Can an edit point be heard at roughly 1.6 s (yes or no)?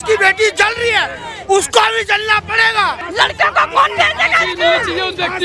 no